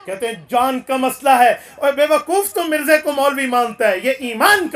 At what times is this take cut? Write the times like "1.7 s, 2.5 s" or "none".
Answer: none